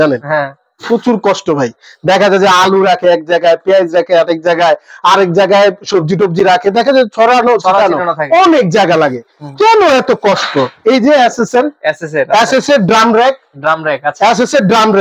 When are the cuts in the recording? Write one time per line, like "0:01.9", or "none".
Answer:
none